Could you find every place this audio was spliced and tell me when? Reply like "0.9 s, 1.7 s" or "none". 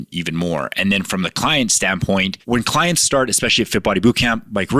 2.4 s